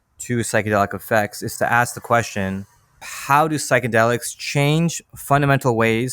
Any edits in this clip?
yes; 1 cut; at 3.1 s

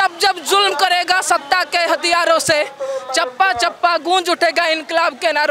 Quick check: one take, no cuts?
yes; 0 cuts

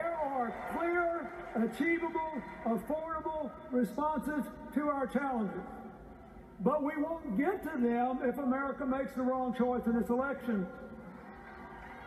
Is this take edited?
yes; 1 cut; at 5.6 s

